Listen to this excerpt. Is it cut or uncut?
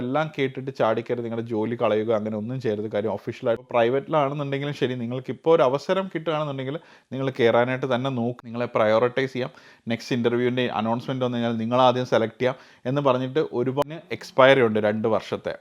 cut